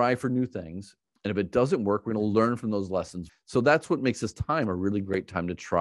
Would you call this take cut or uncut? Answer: cut